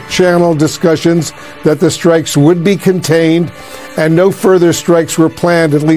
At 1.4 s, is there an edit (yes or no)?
no